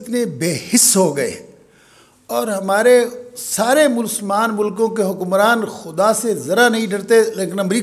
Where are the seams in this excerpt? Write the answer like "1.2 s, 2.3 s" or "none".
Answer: none